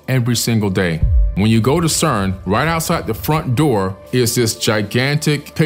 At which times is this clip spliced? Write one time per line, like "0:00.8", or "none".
0:01.3